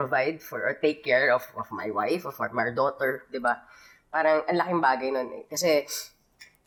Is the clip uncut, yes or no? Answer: yes